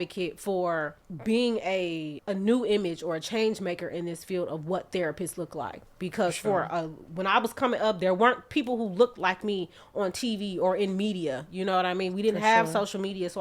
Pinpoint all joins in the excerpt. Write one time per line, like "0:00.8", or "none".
0:01.0
0:02.1